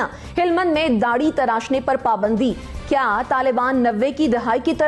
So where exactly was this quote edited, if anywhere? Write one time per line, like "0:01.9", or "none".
none

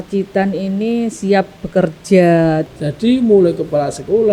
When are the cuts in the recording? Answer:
0:02.6

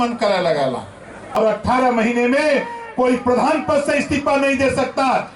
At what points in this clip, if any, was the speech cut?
0:01.4

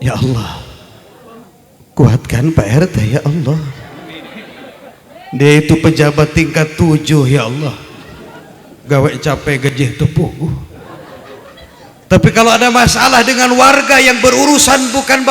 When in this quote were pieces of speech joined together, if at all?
0:01.4

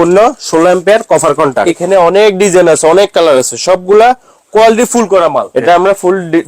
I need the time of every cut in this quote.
0:01.8
0:05.5

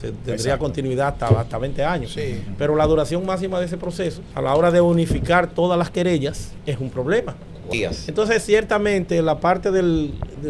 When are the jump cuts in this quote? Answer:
0:04.2
0:06.5
0:07.7

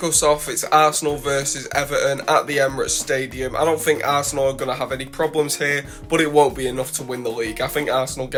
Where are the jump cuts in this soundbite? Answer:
none

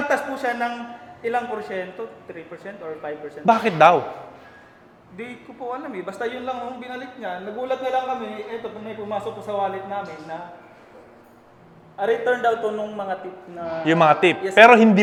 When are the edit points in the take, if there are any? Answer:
none

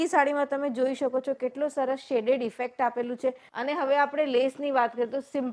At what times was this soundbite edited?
0:03.5

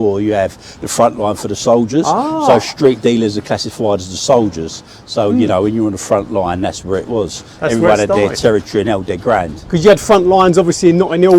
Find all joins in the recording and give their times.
none

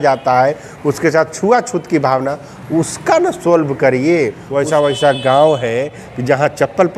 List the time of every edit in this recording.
0:04.4

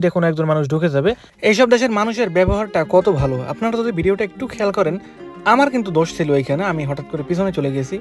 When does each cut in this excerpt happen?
none

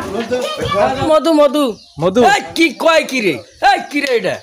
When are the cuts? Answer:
0:01.1

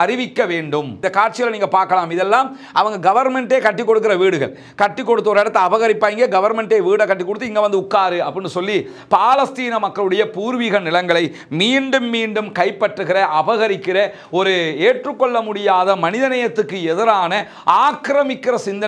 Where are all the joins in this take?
0:01.0

